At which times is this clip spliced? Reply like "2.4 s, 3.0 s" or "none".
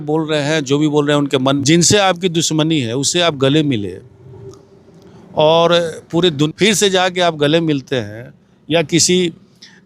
1.6 s, 6.5 s